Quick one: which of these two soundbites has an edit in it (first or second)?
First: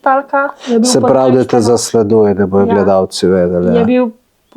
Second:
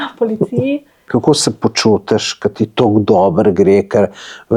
second